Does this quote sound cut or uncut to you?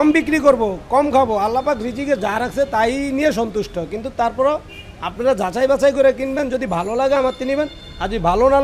uncut